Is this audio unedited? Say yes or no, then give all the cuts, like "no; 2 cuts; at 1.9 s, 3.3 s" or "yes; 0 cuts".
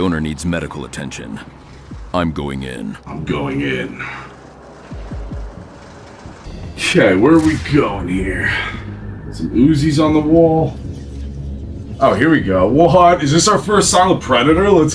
no; 1 cut; at 6.5 s